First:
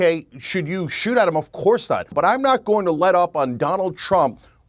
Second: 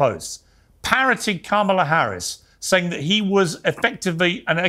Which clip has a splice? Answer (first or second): first